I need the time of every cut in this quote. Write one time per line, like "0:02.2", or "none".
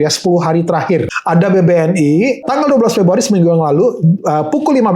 0:01.2